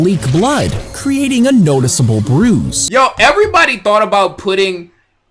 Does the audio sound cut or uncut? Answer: cut